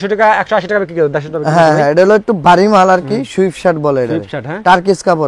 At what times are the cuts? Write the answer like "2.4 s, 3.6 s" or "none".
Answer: none